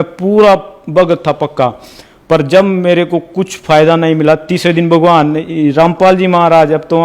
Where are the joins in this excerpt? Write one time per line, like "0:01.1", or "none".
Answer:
none